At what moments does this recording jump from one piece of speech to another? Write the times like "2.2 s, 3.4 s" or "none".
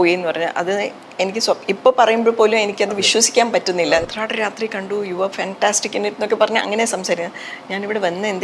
4.1 s